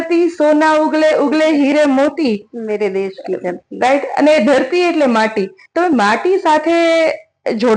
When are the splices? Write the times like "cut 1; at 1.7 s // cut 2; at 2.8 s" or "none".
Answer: none